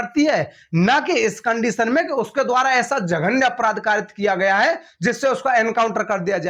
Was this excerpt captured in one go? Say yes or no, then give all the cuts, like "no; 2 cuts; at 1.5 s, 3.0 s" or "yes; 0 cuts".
yes; 0 cuts